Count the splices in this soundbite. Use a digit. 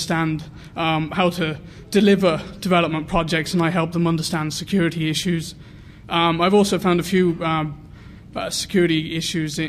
1